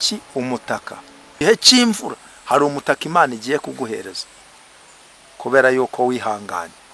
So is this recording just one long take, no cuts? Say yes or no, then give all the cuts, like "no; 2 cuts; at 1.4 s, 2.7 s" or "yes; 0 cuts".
no; 1 cut; at 1.4 s